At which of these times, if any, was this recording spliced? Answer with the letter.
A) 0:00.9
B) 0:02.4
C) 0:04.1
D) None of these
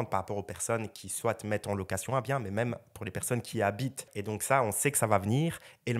C